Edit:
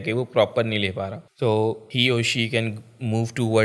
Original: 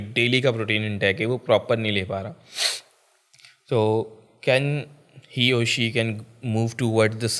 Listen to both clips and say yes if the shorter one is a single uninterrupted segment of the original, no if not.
no